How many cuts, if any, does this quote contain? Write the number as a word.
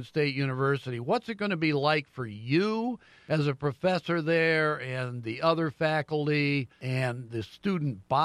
two